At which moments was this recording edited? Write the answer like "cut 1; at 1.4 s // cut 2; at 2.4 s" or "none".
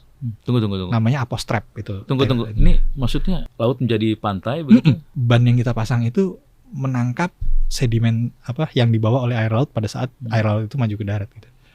cut 1; at 3.5 s // cut 2; at 5.1 s